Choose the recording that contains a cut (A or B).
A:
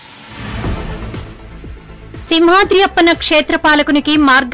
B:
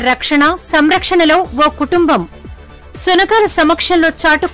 A